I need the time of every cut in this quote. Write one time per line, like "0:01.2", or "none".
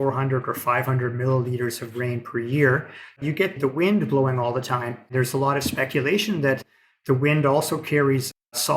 0:03.2
0:05.1